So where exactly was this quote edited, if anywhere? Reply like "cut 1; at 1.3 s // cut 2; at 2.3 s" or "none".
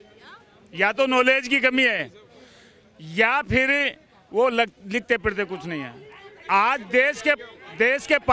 none